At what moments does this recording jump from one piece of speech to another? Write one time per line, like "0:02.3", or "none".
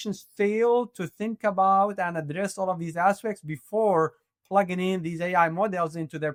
none